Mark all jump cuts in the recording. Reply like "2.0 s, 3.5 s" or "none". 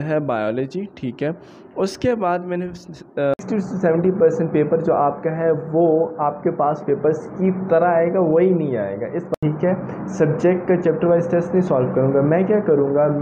3.4 s, 9.3 s